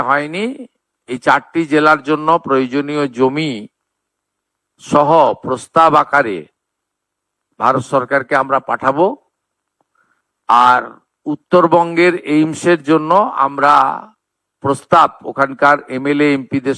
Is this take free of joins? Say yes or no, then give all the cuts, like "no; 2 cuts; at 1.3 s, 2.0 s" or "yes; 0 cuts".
yes; 0 cuts